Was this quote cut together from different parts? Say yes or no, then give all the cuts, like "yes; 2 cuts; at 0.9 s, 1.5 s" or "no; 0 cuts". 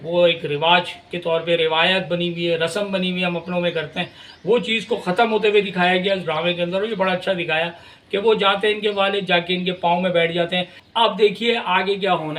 yes; 1 cut; at 10.6 s